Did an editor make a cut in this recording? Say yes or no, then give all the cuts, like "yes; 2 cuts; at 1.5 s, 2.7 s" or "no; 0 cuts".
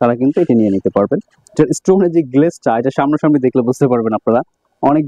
no; 0 cuts